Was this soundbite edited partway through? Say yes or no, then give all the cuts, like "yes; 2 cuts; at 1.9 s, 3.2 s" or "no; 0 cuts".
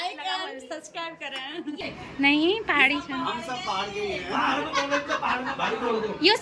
yes; 1 cut; at 1.8 s